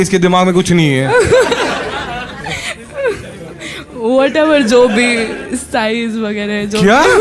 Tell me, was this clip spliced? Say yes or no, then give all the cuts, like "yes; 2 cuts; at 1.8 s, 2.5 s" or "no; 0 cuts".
no; 0 cuts